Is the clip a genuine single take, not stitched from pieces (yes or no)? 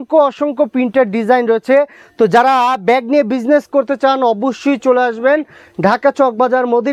yes